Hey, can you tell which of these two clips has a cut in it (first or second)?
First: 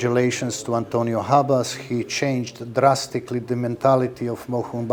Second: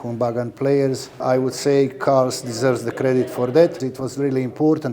second